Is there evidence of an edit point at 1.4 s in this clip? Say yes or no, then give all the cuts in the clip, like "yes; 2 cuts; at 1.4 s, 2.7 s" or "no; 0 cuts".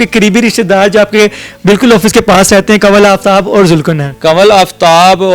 no; 1 cut; at 4.1 s